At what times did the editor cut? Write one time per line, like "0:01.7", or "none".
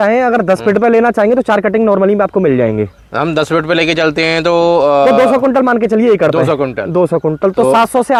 none